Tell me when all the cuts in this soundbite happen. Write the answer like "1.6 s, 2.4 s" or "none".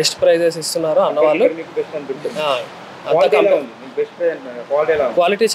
none